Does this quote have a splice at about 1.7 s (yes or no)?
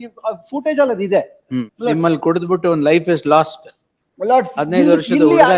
yes